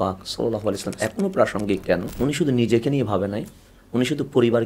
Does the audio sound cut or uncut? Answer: cut